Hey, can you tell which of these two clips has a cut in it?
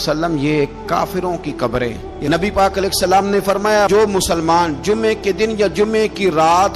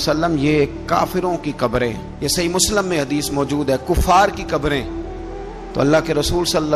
first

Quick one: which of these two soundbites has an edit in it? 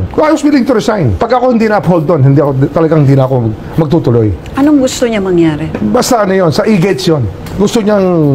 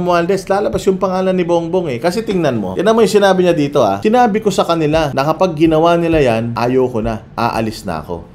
second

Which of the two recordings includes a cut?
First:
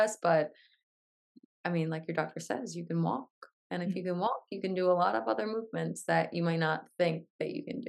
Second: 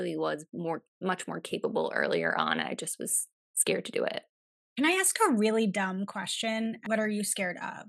second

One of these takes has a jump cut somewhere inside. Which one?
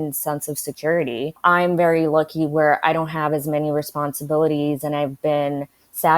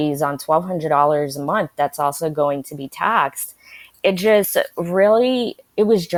first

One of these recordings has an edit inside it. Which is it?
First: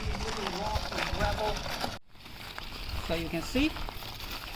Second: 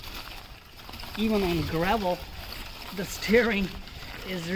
first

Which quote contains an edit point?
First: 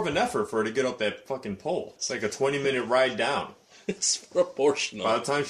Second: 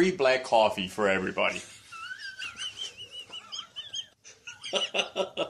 first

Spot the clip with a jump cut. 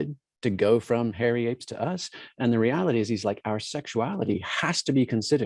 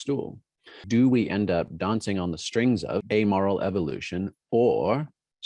second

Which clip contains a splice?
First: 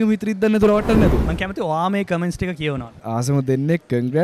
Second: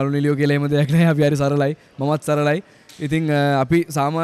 first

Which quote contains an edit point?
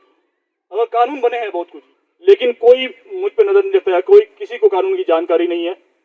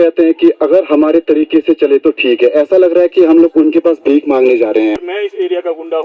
second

